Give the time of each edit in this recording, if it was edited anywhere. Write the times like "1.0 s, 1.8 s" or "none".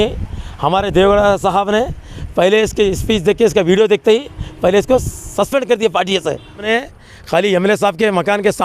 6.7 s